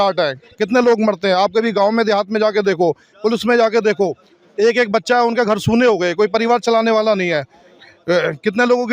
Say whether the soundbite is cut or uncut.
uncut